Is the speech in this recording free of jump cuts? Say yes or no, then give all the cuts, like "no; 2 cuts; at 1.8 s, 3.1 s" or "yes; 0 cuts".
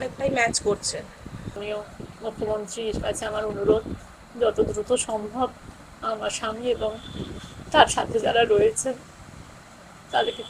no; 1 cut; at 1.5 s